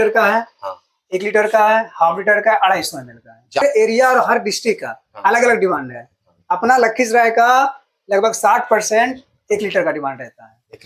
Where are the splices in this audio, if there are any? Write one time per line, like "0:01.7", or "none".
0:03.6